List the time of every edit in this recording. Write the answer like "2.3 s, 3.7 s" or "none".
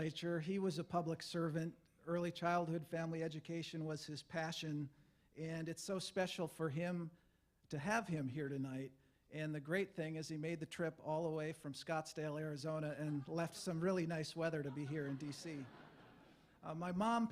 4.8 s